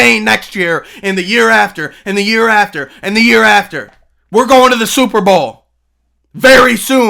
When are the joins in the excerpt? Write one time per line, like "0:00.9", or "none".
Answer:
none